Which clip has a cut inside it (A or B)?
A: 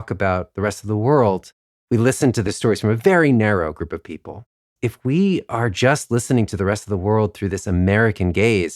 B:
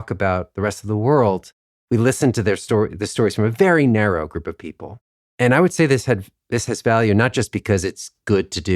A